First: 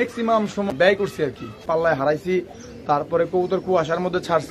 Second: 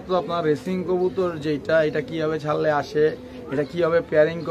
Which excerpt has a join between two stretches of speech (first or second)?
first